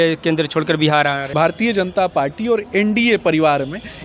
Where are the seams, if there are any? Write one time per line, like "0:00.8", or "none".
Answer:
0:01.2